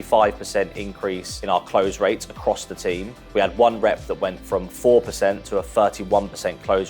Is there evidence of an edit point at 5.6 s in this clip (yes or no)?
no